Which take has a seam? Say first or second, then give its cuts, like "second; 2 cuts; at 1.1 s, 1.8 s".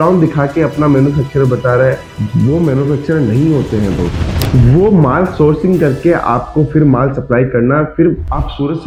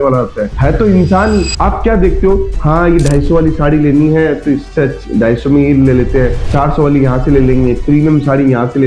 second; 1 cut; at 1.5 s